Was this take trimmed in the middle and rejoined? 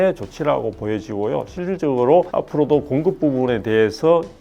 yes; 1 cut; at 2.3 s

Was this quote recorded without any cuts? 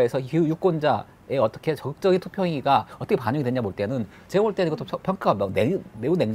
yes; 0 cuts

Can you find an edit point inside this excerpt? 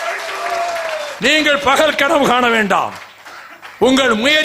yes; 1 cut; at 1.1 s

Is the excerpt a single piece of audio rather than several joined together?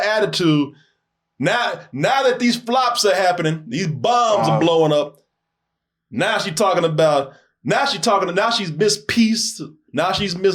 yes; 0 cuts

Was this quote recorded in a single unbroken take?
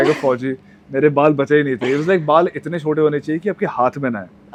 yes; 0 cuts

